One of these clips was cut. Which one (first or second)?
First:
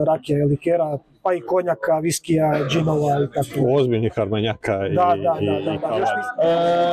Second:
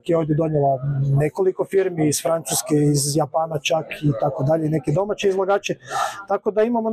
first